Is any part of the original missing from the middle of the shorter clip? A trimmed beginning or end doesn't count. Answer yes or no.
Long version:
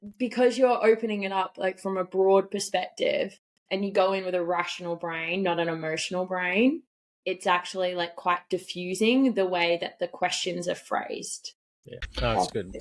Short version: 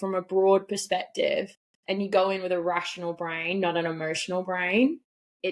no